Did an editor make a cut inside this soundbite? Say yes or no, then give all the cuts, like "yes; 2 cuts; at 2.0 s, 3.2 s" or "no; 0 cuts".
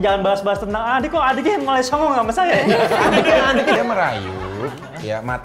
yes; 1 cut; at 3.8 s